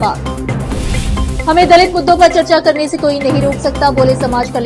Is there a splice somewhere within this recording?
no; 0 cuts

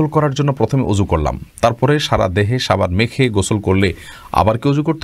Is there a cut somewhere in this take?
no; 0 cuts

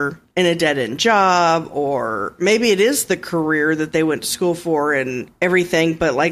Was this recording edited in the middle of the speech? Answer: no; 0 cuts

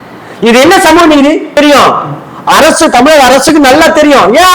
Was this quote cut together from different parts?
yes; 1 cut; at 1.5 s

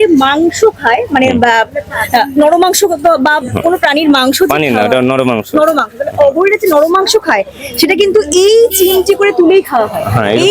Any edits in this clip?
no; 0 cuts

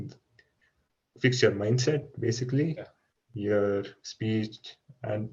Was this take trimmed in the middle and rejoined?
no; 0 cuts

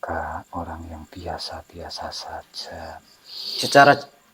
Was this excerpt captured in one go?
yes; 0 cuts

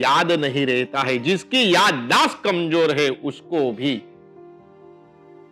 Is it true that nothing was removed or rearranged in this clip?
yes; 0 cuts

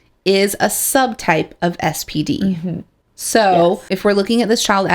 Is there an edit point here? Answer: yes; 1 cut; at 3.9 s

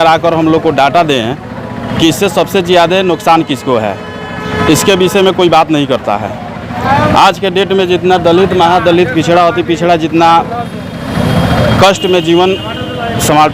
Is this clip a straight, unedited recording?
yes; 0 cuts

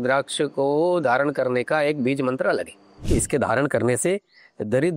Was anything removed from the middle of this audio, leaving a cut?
yes; 1 cut; at 3.1 s

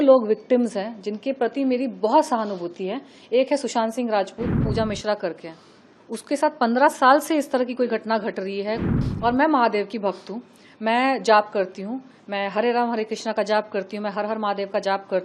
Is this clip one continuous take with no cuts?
no; 2 cuts; at 4.7 s, 8.9 s

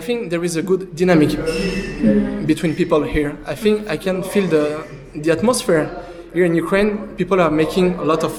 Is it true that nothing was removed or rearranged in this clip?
yes; 0 cuts

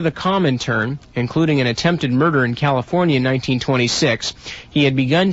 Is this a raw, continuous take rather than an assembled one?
no; 1 cut; at 2.6 s

